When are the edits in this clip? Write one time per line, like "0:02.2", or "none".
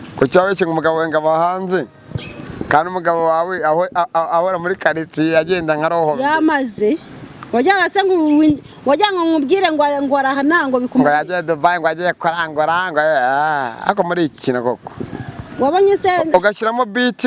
none